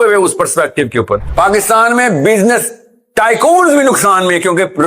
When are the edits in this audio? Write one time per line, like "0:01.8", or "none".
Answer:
0:01.3